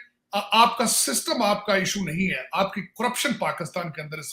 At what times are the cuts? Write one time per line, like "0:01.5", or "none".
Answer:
none